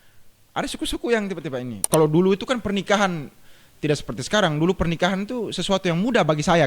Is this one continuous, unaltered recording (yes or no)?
no